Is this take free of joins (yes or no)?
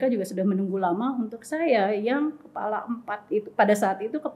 yes